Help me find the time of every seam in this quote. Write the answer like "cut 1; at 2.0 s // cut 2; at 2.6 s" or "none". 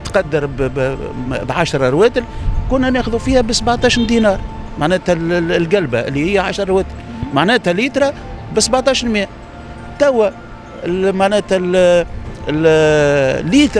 none